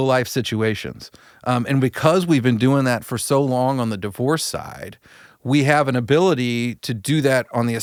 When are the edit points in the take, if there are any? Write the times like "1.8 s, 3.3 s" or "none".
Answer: none